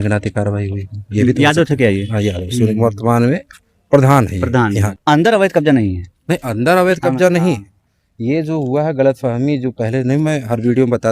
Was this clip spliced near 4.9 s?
yes; 1 cut; at 4.9 s

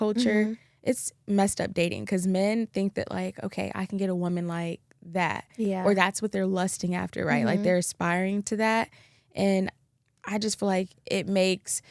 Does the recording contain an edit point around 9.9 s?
no; 0 cuts

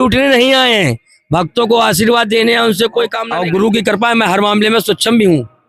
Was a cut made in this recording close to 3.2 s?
yes; 1 cut; at 3.2 s

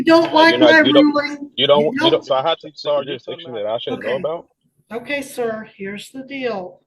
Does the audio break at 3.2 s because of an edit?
yes; 1 cut; at 3.2 s

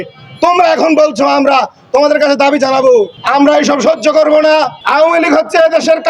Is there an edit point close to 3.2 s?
yes; 2 cuts; at 3.2 s, 4.8 s

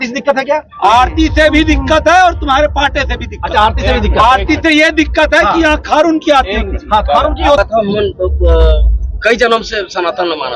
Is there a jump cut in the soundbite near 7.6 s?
yes; 1 cut; at 7.6 s

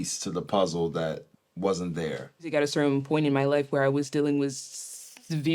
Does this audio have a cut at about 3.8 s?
no; 2 cuts; at 1.3 s, 2.5 s

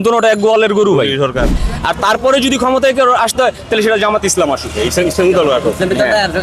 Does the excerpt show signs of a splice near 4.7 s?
no; 1 cut; at 1.7 s

